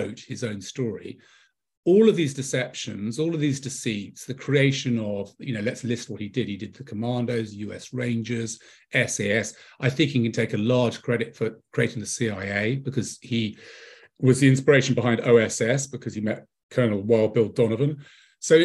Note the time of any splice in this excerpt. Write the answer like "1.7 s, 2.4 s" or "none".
none